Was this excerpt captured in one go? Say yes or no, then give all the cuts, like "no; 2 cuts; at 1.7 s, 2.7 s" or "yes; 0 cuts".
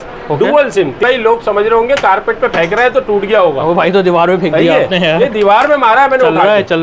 no; 1 cut; at 1.0 s